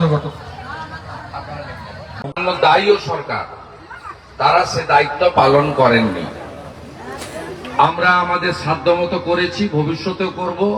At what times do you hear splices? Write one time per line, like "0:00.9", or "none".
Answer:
0:02.3